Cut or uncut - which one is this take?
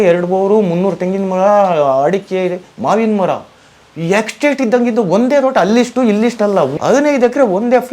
cut